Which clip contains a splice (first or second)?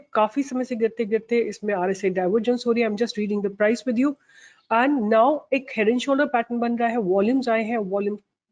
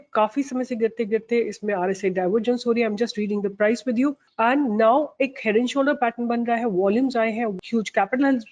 second